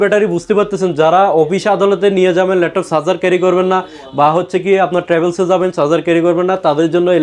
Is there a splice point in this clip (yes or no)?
no